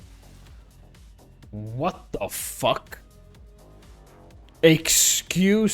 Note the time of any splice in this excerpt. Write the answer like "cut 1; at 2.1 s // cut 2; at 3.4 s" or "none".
cut 1; at 3.0 s // cut 2; at 4.6 s